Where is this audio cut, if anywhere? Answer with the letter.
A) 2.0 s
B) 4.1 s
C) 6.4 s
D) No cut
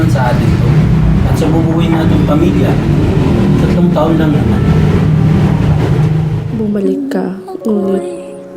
C